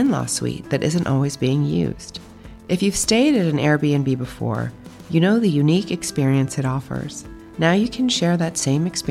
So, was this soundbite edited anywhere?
no; 0 cuts

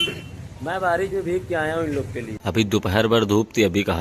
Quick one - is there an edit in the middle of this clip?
yes; 1 cut; at 2.3 s

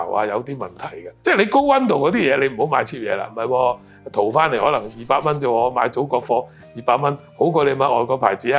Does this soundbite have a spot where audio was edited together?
yes; 2 cuts; at 1.0 s, 3.3 s

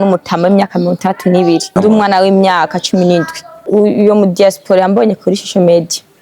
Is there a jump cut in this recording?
yes; 2 cuts; at 1.7 s, 3.6 s

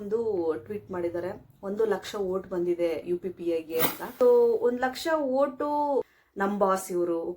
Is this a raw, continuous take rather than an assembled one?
no; 2 cuts; at 4.0 s, 6.1 s

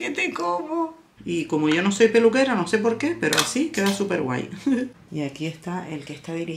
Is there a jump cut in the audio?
yes; 2 cuts; at 1.0 s, 4.9 s

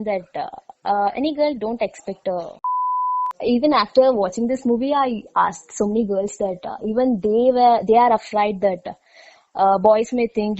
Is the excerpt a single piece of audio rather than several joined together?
no; 1 cut; at 3.0 s

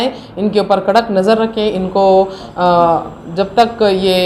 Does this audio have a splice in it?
no; 0 cuts

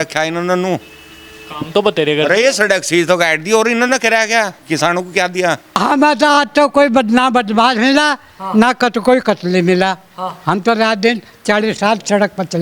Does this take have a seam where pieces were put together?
yes; 1 cut; at 5.8 s

